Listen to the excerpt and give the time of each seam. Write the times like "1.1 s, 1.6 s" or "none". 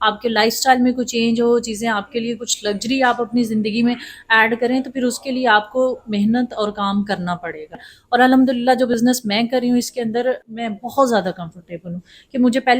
7.9 s, 10.5 s